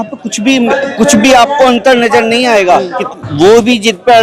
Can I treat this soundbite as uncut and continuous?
no; 1 cut; at 3.0 s

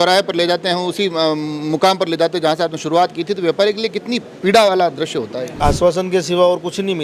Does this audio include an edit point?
yes; 1 cut; at 5.6 s

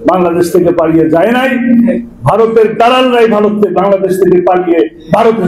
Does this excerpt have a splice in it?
no; 0 cuts

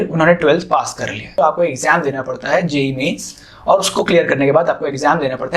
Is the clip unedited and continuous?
no; 1 cut; at 1.2 s

